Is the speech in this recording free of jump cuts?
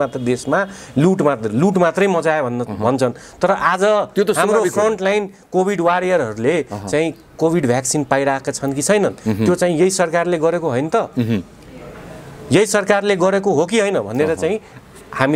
yes; 0 cuts

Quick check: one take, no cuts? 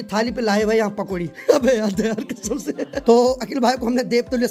yes; 0 cuts

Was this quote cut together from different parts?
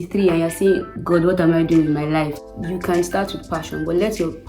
yes; 1 cut; at 2.4 s

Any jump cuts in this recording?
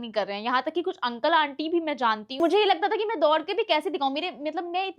yes; 1 cut; at 2.3 s

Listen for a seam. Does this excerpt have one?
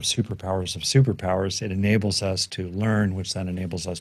no; 0 cuts

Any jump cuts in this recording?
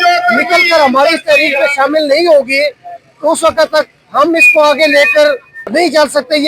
yes; 1 cut; at 5.5 s

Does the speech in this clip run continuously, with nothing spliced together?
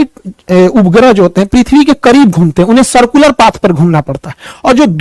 yes; 0 cuts

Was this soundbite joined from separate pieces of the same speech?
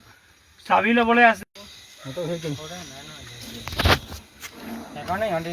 yes; 1 cut; at 1.4 s

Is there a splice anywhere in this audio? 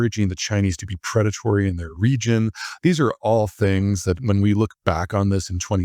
no; 0 cuts

